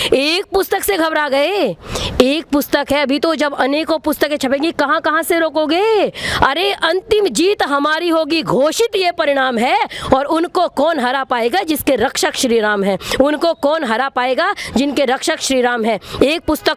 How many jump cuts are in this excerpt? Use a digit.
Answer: 0